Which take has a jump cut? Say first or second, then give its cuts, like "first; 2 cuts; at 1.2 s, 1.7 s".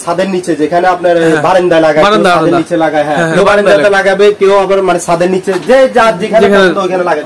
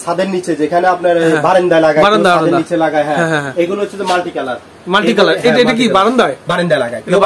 first; 1 cut; at 3.3 s